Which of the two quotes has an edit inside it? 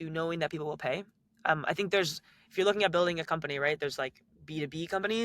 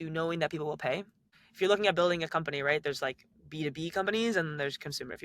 second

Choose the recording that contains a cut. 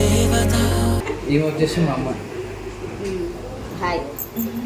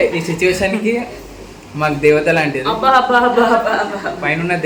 first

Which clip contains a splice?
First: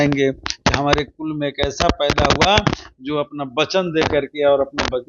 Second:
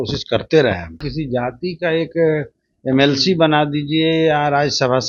second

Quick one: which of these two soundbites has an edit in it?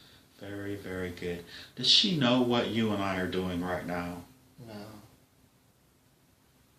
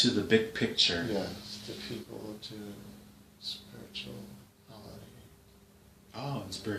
second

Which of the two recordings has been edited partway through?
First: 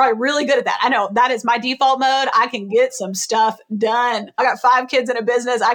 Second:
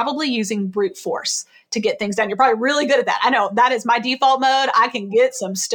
first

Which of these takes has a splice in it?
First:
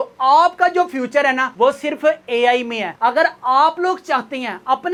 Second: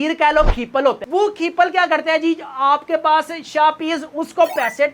second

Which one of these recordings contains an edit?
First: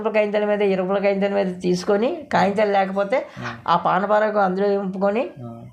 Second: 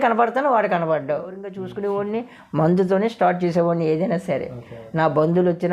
second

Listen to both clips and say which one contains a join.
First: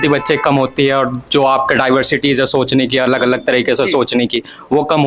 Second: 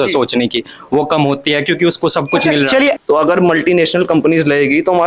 second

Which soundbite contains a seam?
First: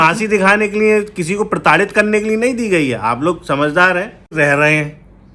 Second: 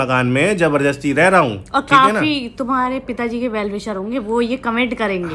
first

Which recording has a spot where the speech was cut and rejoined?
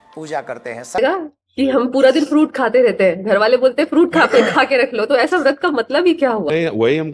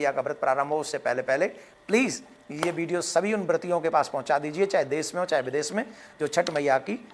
first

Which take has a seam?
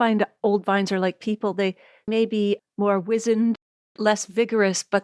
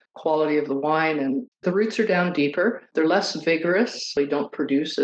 second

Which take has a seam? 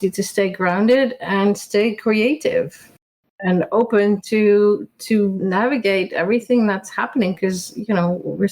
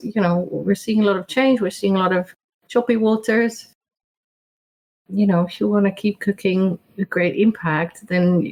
first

